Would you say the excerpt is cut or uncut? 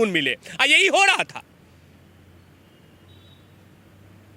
uncut